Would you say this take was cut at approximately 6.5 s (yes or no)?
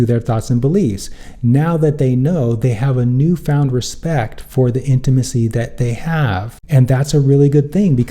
yes